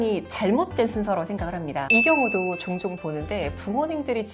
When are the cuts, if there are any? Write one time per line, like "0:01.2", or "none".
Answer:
0:01.9